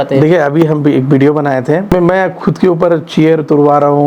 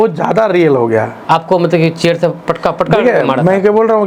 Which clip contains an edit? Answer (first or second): first